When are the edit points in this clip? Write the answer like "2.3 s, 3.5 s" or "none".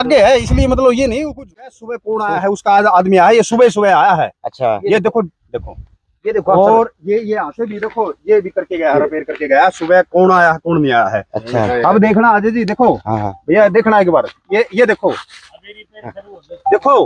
1.4 s